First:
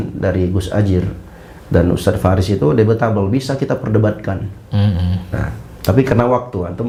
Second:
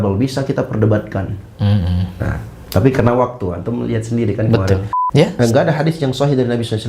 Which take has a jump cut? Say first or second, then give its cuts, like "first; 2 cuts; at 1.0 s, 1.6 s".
second; 1 cut; at 4.9 s